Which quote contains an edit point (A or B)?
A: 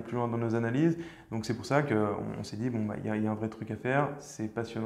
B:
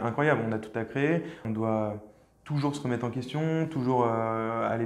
B